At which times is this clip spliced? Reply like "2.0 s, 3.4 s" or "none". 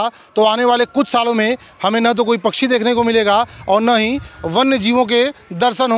none